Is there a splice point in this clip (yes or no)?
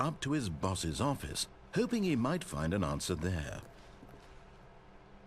yes